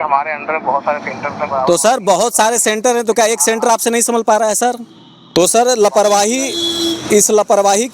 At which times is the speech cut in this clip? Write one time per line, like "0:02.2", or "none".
0:05.2

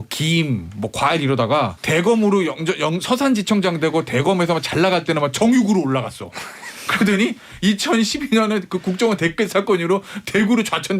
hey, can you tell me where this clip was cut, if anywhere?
0:01.8

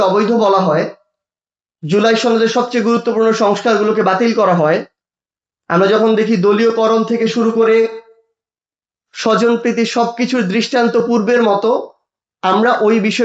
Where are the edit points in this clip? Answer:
none

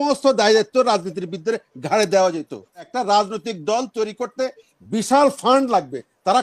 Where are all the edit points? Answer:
0:02.9

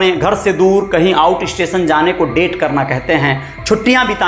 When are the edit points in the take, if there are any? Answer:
none

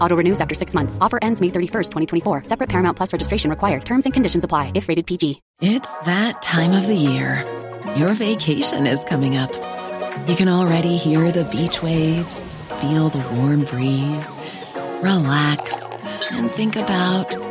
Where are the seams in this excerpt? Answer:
0:05.5

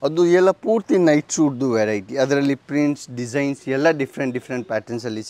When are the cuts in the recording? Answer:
none

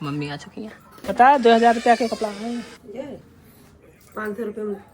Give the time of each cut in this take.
0:01.0
0:02.8

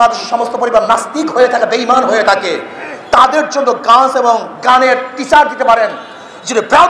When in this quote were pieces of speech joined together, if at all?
none

